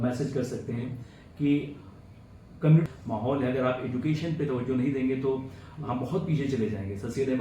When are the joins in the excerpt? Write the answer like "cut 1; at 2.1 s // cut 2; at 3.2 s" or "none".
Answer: cut 1; at 2.8 s